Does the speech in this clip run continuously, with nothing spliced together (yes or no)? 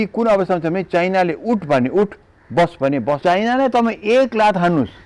no